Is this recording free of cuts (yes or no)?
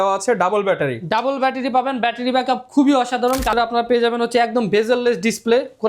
no